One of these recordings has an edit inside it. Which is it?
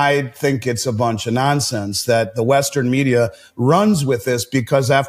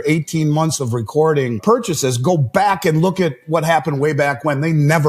second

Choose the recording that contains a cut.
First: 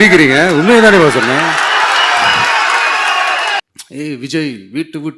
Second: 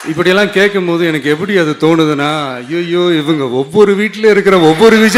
first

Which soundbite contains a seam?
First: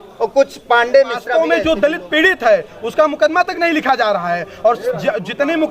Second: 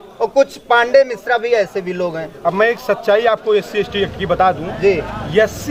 first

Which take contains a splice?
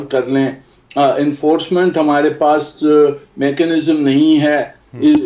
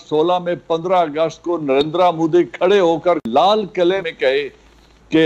second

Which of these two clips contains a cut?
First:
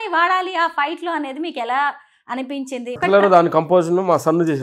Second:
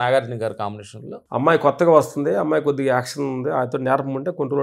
first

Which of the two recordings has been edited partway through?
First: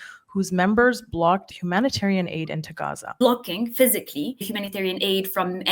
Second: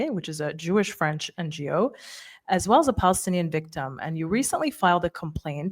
first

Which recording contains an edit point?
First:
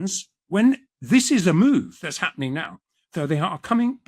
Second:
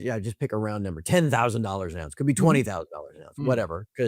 first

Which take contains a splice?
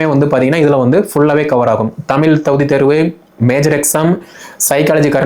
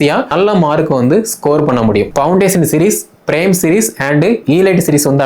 second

